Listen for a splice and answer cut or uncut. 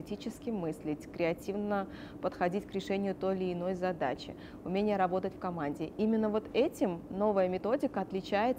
uncut